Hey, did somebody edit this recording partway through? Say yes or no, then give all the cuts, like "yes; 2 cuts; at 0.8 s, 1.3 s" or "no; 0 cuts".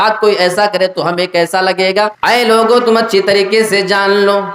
yes; 1 cut; at 2.2 s